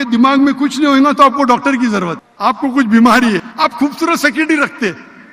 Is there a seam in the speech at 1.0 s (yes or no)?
no